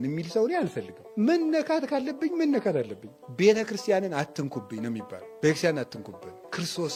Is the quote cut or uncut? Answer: uncut